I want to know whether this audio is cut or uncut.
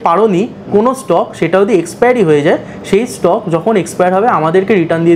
uncut